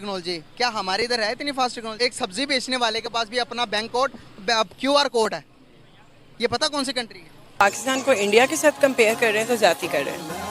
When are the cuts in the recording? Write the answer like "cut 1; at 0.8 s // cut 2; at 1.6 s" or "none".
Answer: cut 1; at 1.9 s // cut 2; at 7.6 s